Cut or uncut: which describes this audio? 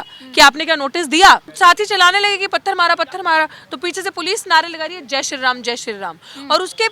cut